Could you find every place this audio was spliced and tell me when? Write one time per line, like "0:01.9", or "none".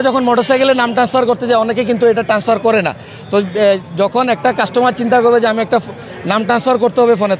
none